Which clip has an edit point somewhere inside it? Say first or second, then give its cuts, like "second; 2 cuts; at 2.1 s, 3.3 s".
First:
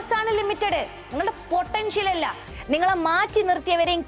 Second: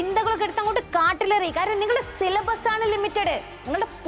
first; 1 cut; at 2.5 s